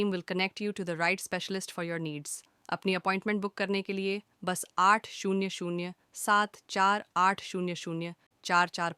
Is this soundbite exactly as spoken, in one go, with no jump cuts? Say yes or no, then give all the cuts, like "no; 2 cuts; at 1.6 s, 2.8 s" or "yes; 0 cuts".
no; 1 cut; at 3.4 s